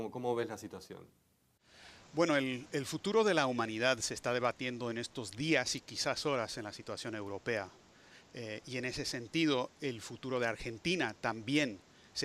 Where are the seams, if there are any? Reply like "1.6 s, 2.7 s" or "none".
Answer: 3.5 s